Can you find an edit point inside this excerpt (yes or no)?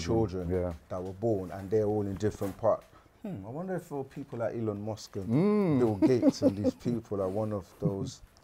no